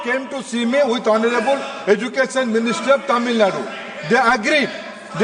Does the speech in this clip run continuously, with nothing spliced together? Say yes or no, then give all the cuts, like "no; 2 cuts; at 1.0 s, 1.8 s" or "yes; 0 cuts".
yes; 0 cuts